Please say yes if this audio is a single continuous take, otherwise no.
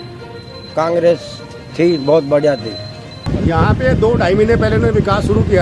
no